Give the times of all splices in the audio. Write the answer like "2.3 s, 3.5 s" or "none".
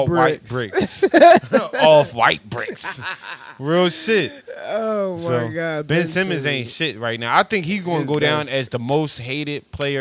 none